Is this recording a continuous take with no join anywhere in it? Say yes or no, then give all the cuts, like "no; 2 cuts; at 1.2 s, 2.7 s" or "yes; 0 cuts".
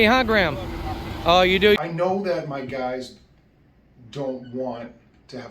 no; 1 cut; at 1.8 s